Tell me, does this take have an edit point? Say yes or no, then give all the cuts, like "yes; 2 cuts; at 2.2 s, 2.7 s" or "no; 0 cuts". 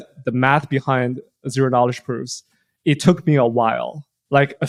no; 0 cuts